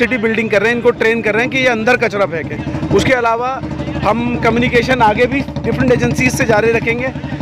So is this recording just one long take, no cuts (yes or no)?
yes